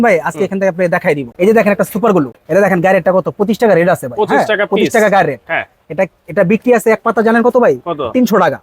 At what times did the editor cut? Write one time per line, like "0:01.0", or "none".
0:01.3
0:02.4